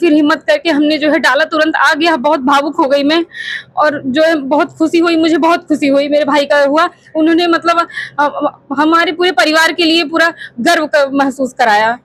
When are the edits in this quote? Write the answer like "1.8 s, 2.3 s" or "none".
none